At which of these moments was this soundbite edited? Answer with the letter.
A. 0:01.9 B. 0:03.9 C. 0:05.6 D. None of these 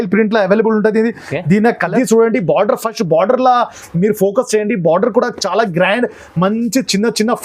A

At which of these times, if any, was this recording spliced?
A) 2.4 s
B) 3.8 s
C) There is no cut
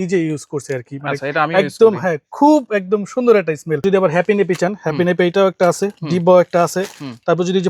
B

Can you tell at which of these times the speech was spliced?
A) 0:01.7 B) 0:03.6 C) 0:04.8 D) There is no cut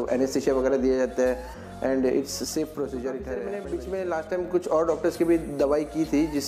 B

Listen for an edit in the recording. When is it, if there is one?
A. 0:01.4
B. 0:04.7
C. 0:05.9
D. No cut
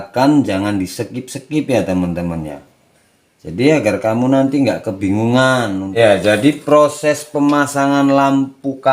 C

